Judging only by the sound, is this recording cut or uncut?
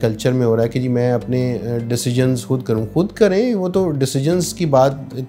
uncut